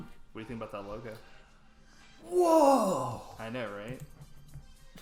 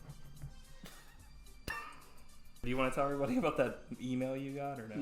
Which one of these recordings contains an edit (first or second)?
second